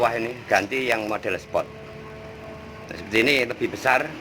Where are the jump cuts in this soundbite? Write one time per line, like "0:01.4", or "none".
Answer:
0:02.2